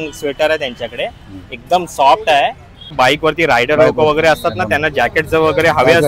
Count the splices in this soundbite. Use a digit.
1